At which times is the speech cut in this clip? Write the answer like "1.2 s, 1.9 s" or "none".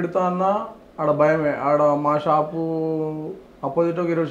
none

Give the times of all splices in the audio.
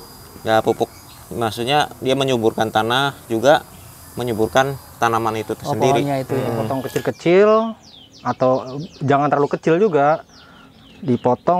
6.7 s

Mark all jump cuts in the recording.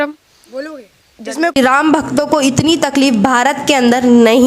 1.6 s

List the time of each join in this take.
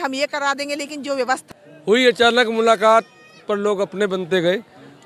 1.5 s

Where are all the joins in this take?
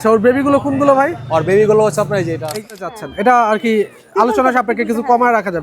2.6 s

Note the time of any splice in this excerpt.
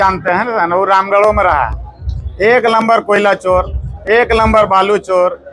none

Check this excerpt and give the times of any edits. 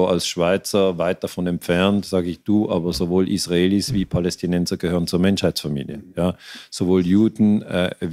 none

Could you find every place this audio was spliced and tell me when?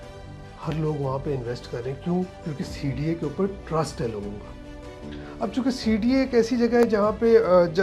none

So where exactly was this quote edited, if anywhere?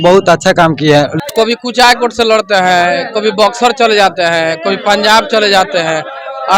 1.1 s

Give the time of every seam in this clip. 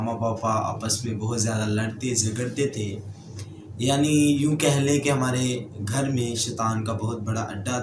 none

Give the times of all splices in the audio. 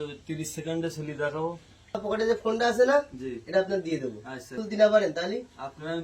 2.0 s, 4.6 s

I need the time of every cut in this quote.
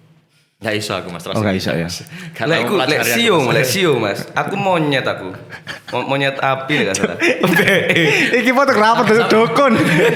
none

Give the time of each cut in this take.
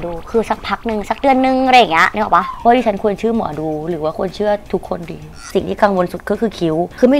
2.5 s, 5.4 s

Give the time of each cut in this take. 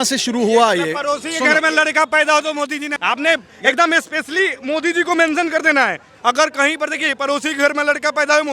2.9 s

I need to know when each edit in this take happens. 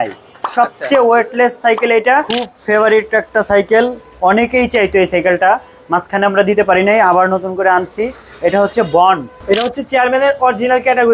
2.4 s, 9.3 s

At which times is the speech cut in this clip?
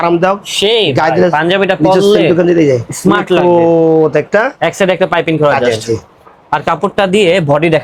none

